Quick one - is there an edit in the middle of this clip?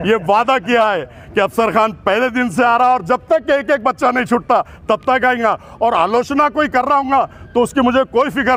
no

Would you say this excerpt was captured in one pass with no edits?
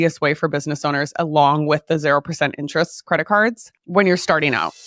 no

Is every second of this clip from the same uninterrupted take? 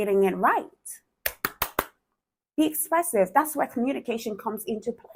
yes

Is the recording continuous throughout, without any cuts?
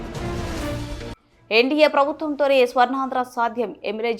no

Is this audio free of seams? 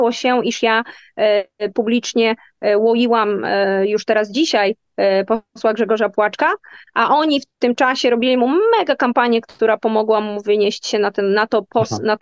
yes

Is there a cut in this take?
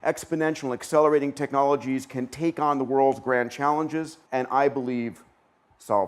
no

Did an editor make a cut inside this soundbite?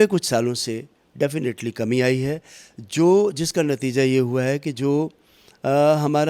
no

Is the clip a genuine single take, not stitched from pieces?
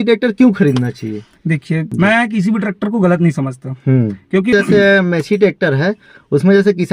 no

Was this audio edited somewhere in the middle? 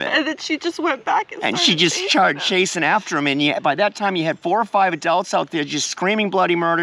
no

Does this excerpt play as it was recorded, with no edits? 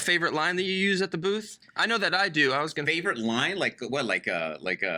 yes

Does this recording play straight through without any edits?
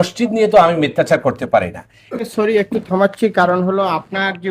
no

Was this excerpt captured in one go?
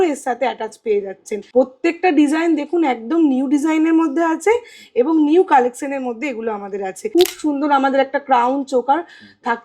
no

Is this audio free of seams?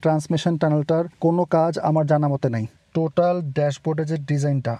no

